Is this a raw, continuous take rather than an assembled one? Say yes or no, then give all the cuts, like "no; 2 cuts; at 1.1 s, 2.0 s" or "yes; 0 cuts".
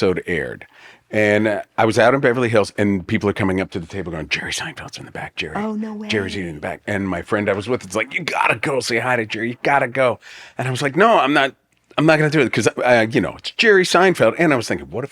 yes; 0 cuts